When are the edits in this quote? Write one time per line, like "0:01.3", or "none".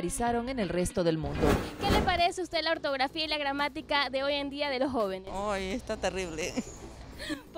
0:01.7

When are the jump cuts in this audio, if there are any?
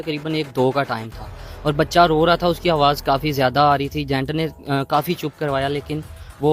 none

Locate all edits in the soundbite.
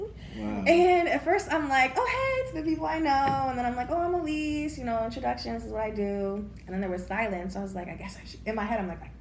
none

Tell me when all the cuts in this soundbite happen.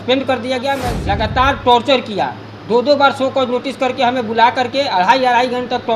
0:00.9

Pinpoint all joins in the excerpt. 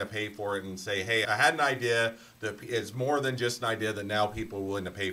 0:01.2

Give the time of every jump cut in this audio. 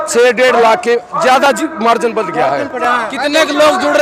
none

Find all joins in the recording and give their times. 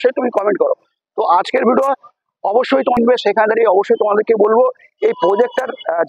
0:03.0

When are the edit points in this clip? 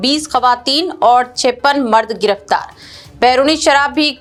none

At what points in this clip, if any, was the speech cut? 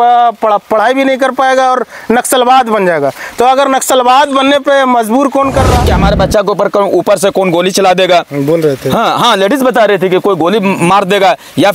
0:05.9

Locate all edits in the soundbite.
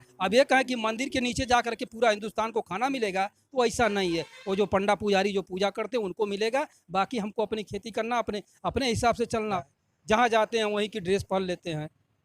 0:09.6

